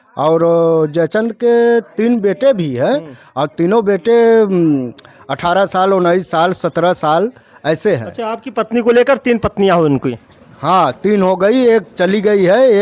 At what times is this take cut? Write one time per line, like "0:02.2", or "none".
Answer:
none